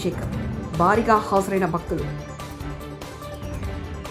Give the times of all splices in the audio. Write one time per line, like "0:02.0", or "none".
none

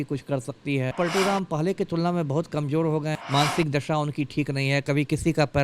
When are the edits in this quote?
0:00.9
0:03.2

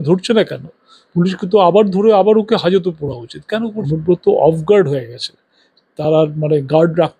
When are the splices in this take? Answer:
0:03.8

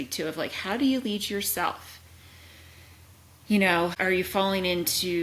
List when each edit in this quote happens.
0:04.0

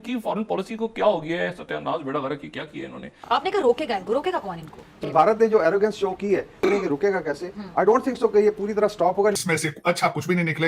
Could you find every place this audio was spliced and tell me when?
0:03.1
0:05.0
0:06.6
0:09.4

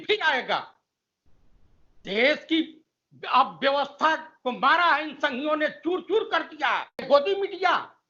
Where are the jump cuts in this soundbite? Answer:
0:07.0

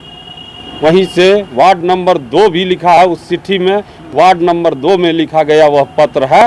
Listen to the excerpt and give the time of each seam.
none

